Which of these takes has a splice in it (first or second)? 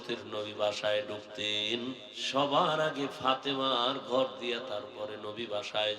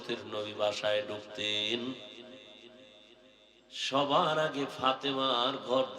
first